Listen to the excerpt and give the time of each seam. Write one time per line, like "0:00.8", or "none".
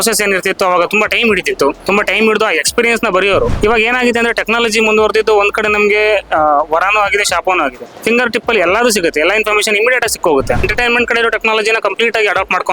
0:01.8
0:03.5
0:07.9
0:10.7